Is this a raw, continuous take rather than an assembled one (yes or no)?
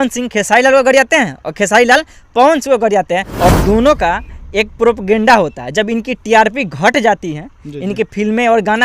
no